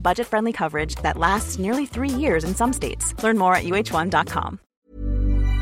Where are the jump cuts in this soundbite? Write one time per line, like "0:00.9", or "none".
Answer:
0:04.7